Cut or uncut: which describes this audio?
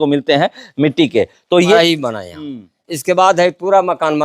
cut